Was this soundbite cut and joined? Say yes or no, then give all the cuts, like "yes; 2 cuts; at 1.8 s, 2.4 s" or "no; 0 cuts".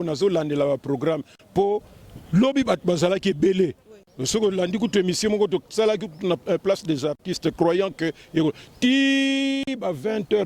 no; 0 cuts